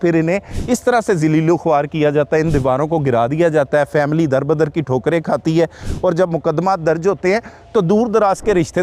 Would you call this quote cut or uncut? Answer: uncut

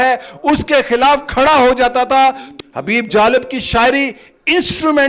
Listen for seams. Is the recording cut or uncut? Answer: cut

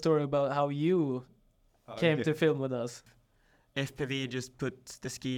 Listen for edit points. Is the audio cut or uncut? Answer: cut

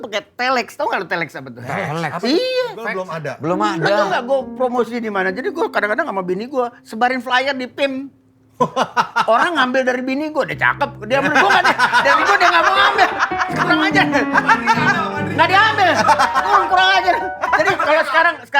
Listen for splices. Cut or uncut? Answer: cut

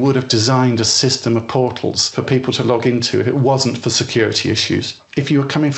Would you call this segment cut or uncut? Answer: cut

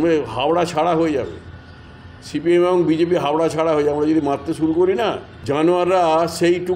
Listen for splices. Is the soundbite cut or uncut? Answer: cut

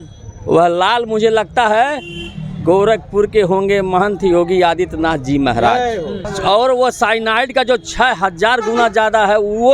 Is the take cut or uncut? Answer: cut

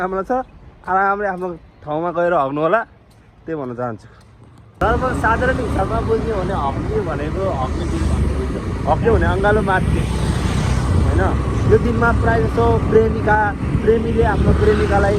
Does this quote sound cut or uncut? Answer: cut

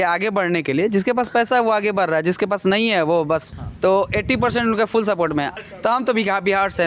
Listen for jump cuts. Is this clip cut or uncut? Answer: cut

